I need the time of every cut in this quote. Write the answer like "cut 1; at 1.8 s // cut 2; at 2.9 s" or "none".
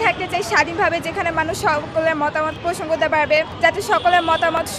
cut 1; at 2.6 s // cut 2; at 3.5 s

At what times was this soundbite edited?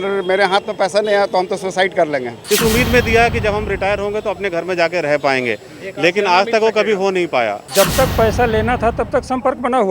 cut 1; at 2.4 s // cut 2; at 7.6 s

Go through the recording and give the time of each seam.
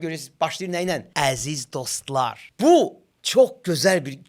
cut 1; at 1.1 s // cut 2; at 2.4 s

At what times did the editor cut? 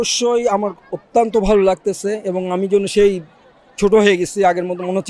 none

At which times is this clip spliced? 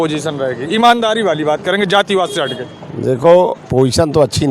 cut 1; at 3.6 s

